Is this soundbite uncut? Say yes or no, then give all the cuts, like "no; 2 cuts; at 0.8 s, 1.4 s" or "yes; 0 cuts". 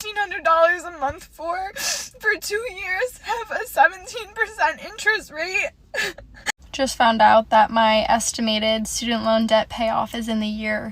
no; 1 cut; at 6.6 s